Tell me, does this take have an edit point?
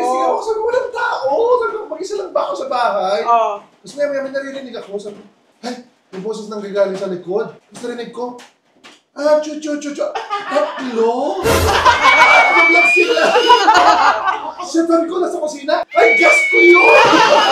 no; 0 cuts

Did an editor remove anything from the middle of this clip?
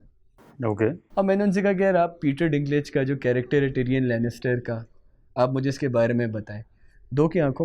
yes; 1 cut; at 1.0 s

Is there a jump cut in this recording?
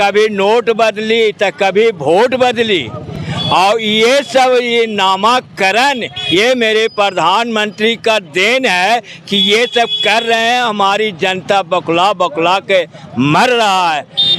no; 0 cuts

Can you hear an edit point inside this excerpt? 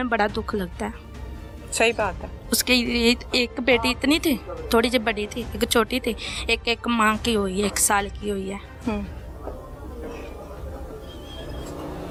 no; 0 cuts

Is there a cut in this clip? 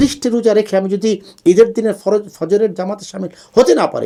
no; 0 cuts

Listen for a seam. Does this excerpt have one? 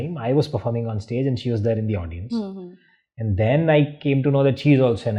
no; 0 cuts

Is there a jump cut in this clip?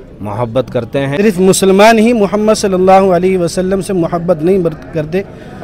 yes; 1 cut; at 1.2 s

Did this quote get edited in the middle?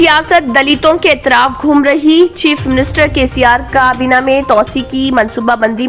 no; 0 cuts

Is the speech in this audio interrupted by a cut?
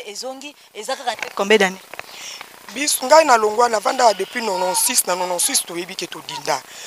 yes; 1 cut; at 1.2 s

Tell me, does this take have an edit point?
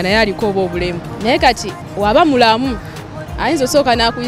yes; 1 cut; at 1.1 s

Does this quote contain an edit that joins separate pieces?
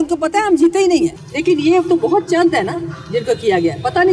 yes; 1 cut; at 1.2 s

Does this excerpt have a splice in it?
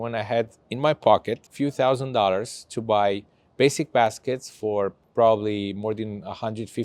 no; 0 cuts

